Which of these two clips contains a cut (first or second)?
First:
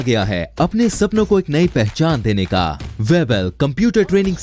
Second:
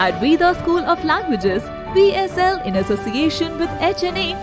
first